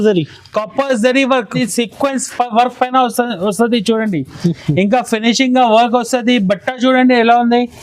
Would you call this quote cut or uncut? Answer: cut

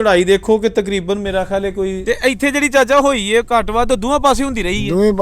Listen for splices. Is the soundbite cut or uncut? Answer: cut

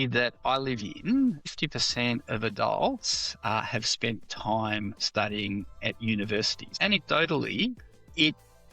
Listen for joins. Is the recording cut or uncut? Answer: cut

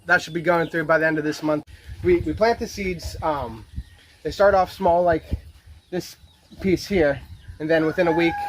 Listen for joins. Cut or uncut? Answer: cut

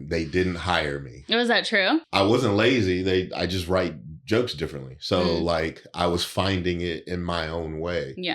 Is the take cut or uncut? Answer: cut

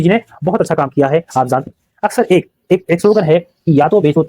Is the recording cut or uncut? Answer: cut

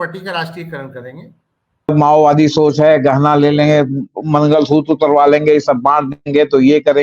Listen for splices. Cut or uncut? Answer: cut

